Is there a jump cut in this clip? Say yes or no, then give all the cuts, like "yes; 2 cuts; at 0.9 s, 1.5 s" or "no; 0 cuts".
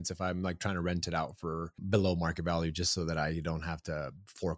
no; 0 cuts